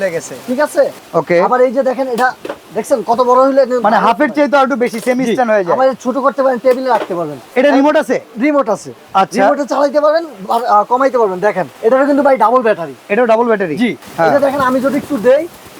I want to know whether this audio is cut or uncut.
cut